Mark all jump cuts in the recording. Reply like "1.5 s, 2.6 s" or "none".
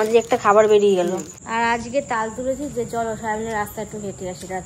1.4 s